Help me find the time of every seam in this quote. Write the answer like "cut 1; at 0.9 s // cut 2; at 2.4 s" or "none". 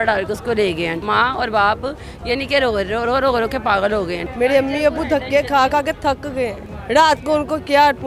cut 1; at 1.0 s // cut 2; at 4.2 s // cut 3; at 6.7 s